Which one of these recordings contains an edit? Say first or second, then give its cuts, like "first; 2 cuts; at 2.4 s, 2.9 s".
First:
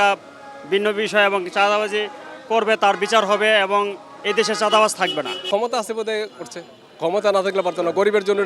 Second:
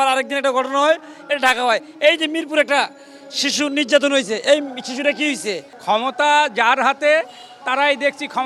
first; 1 cut; at 5.4 s